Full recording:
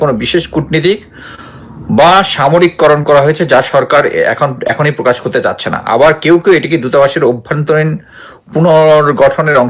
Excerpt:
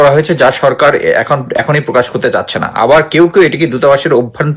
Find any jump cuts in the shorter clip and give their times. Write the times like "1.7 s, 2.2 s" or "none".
none